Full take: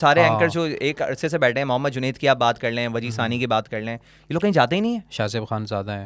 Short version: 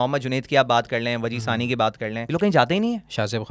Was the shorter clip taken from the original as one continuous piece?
no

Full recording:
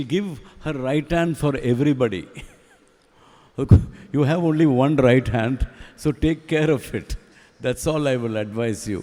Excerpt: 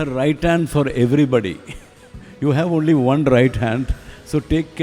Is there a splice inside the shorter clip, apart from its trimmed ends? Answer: yes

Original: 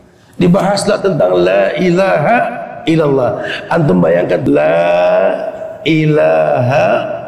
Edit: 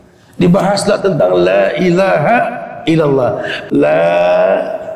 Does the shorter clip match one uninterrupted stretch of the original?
no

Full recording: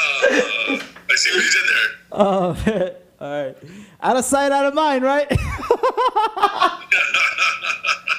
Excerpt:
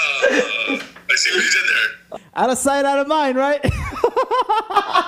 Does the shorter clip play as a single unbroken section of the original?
no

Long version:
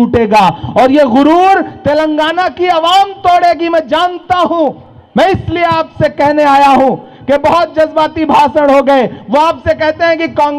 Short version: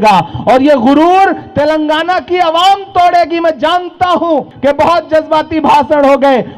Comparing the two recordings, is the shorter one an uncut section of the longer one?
no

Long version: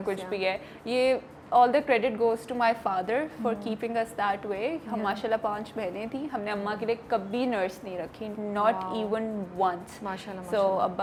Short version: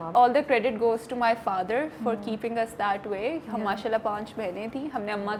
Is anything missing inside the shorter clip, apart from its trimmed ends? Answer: no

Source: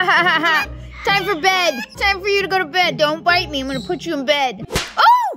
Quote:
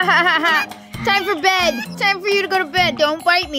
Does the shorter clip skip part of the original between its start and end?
no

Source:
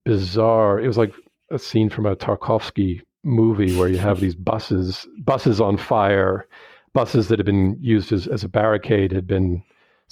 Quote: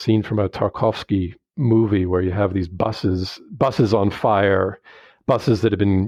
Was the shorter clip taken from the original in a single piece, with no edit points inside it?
yes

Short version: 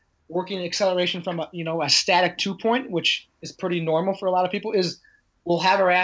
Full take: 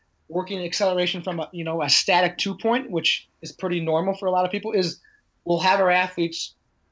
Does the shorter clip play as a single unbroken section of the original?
yes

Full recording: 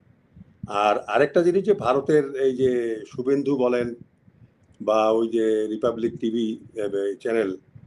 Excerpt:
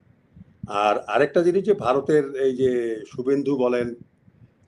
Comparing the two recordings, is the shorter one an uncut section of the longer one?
yes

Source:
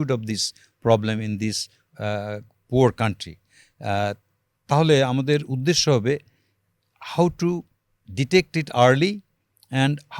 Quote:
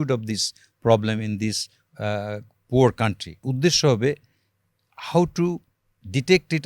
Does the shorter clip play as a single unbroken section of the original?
no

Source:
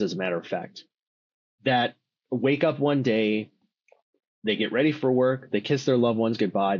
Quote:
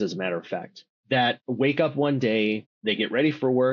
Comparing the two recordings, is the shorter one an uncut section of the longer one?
no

